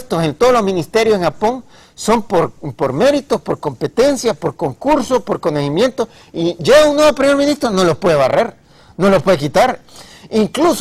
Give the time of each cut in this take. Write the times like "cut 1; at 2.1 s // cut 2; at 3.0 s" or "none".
cut 1; at 7.6 s